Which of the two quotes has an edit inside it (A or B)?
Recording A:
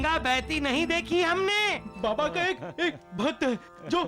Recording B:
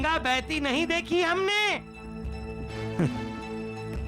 A